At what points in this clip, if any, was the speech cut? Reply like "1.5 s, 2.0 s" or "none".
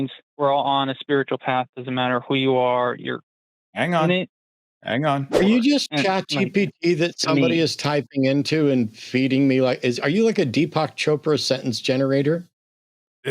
5.3 s